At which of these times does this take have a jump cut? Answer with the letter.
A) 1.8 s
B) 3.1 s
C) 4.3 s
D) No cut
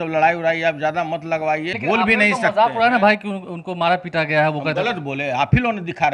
A